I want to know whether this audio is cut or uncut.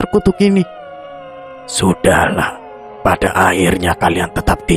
uncut